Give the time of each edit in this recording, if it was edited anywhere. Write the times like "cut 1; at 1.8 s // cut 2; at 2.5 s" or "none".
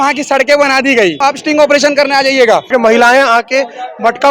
cut 1; at 1.2 s // cut 2; at 2.7 s